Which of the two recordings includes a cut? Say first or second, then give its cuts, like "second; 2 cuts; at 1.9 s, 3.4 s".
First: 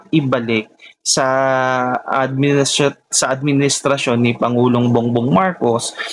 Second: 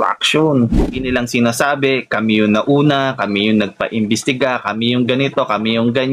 second; 1 cut; at 1.0 s